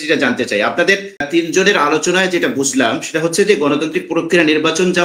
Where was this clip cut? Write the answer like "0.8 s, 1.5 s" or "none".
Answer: 1.3 s